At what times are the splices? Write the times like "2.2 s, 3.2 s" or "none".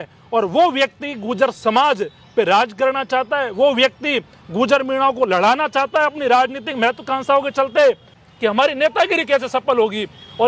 8.2 s